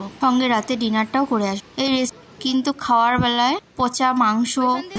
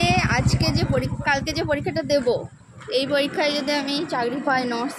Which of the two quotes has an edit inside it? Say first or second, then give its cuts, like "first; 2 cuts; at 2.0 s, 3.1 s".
first; 1 cut; at 2.1 s